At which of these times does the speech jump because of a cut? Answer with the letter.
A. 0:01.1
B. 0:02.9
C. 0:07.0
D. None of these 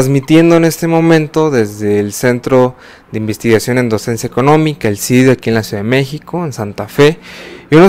D